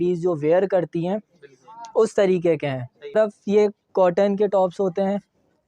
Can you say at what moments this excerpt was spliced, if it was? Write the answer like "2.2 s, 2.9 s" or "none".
3.1 s

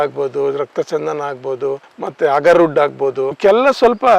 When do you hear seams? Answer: 1.9 s

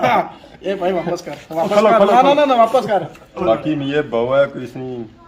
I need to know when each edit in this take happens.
3.4 s

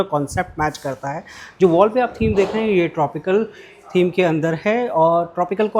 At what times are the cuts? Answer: none

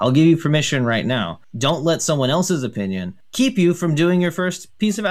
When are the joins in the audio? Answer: 1.4 s, 3.2 s

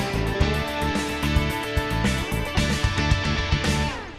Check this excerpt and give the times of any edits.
2.5 s

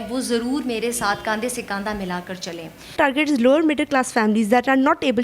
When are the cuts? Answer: 2.9 s

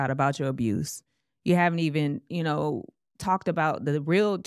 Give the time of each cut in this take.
none

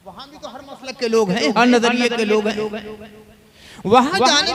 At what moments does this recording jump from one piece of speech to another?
none

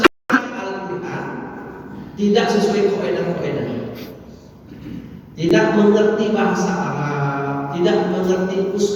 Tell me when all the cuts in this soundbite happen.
none

